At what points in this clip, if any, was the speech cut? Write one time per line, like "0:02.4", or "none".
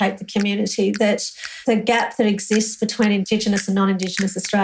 0:01.5